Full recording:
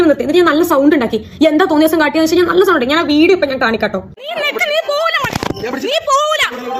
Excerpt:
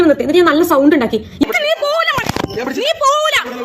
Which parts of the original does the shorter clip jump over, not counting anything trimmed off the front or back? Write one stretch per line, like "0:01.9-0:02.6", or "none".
0:01.4-0:04.5